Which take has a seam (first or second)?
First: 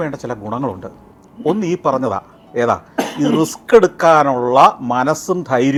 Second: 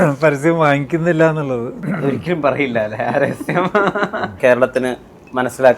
second